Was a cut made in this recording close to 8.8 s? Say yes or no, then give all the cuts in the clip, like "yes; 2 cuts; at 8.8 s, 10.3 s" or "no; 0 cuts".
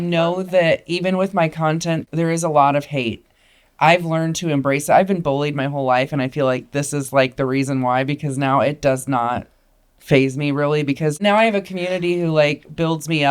no; 2 cuts; at 2.0 s, 11.2 s